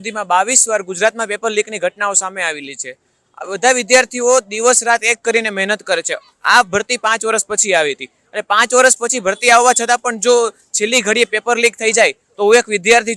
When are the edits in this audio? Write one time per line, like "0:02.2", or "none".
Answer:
none